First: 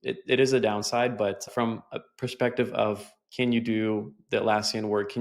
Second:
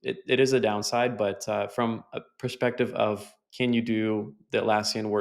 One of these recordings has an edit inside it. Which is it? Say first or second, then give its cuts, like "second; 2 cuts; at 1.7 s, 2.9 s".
first; 1 cut; at 1.5 s